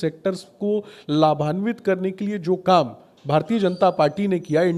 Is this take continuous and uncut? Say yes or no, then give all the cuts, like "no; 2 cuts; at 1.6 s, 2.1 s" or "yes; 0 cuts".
yes; 0 cuts